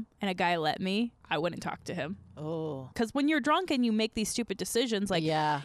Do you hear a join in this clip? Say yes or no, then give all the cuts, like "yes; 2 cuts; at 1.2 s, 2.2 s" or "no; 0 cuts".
yes; 1 cut; at 2.9 s